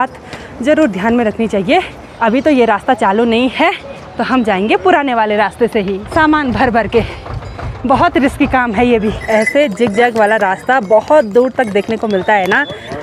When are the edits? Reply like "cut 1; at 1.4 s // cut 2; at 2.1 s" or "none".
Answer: cut 1; at 2.0 s // cut 2; at 6.0 s // cut 3; at 9.2 s